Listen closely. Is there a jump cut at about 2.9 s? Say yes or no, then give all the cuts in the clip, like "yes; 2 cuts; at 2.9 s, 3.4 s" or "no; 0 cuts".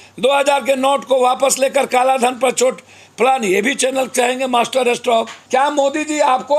no; 1 cut; at 5.4 s